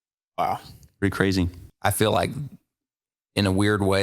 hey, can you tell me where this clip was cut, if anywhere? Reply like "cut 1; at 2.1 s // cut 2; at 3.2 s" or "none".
cut 1; at 1.6 s